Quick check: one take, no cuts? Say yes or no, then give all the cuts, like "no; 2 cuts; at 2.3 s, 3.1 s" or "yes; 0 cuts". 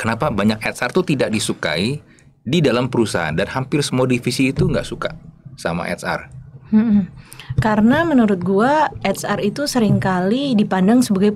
yes; 0 cuts